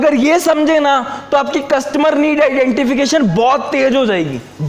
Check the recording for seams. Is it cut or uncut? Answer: uncut